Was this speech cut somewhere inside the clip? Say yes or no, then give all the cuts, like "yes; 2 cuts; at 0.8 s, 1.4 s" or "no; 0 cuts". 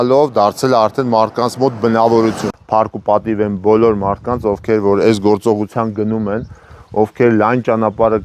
yes; 1 cut; at 2.5 s